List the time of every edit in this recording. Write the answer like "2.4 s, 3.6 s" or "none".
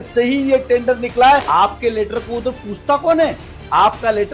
1.5 s